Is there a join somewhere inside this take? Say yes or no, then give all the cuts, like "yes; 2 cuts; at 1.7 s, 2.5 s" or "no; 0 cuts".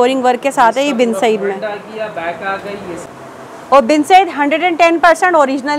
yes; 1 cut; at 3.1 s